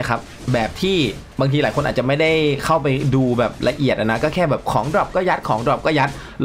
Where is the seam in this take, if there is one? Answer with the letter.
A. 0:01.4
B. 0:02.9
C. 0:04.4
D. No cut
D